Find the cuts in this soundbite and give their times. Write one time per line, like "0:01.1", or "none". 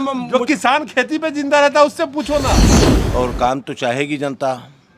0:02.7